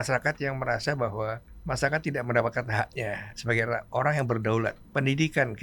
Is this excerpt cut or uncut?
cut